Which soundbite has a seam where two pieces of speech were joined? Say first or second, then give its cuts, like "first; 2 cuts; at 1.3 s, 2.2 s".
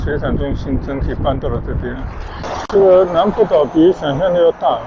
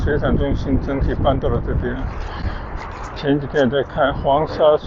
first; 1 cut; at 2.4 s